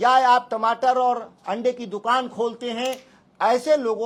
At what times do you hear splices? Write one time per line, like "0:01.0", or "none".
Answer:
none

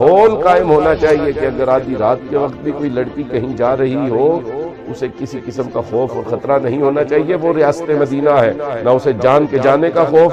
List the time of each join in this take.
none

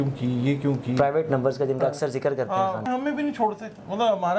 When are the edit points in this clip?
0:02.9

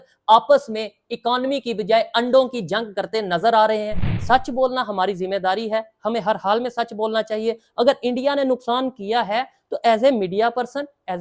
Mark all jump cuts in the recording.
0:04.1

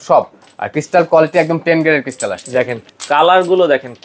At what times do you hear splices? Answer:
0:02.8

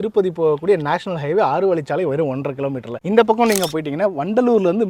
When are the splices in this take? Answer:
none

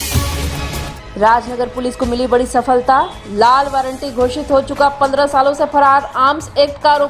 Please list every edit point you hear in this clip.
0:00.9

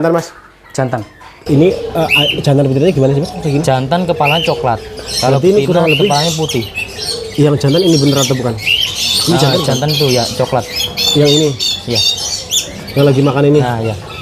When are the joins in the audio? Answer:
0:01.3

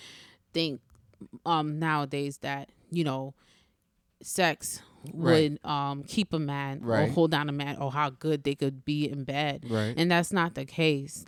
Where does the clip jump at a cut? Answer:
none

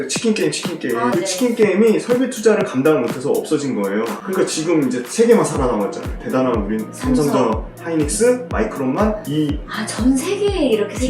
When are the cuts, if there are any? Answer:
0:01.1

